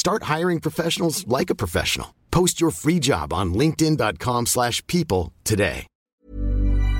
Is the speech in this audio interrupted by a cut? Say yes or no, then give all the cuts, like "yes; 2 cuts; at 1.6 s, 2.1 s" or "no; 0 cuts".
yes; 1 cut; at 5.9 s